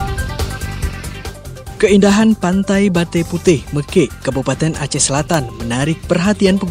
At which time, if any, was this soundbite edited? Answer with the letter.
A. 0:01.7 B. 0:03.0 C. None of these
A